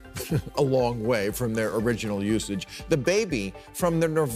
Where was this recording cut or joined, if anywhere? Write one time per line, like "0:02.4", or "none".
none